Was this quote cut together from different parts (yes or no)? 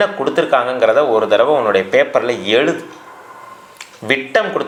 no